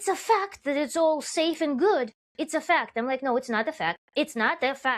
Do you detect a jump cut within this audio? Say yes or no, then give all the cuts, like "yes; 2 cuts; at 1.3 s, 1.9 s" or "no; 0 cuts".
yes; 1 cut; at 4.0 s